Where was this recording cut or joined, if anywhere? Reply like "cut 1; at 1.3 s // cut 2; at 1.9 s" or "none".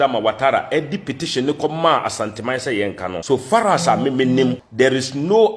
cut 1; at 3.2 s // cut 2; at 4.6 s